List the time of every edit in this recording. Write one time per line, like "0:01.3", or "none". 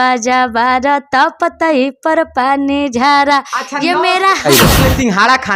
0:04.7